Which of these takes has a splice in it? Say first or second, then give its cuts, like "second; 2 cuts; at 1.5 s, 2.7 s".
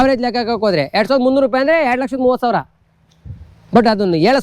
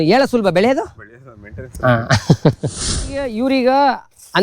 second; 1 cut; at 3.3 s